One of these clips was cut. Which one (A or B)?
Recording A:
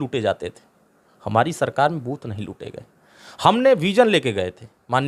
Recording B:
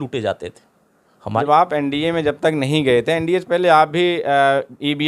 B